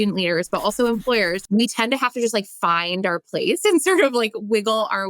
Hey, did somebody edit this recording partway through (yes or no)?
yes